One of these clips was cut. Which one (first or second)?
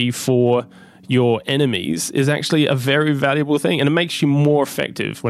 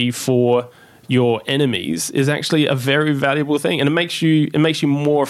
first